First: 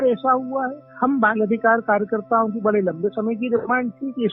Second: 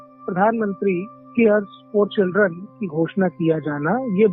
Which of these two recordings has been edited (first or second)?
second